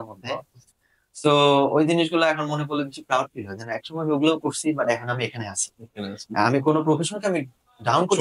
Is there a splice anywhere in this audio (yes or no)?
no